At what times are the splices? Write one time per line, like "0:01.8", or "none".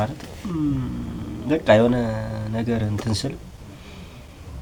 none